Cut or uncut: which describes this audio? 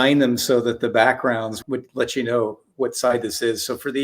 cut